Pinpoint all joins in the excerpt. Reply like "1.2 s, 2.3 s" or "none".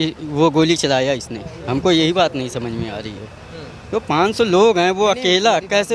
none